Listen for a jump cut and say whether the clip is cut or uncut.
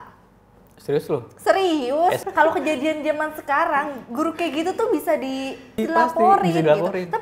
cut